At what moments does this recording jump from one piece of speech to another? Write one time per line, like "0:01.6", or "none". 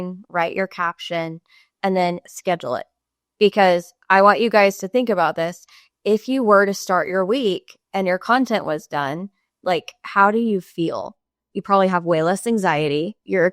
none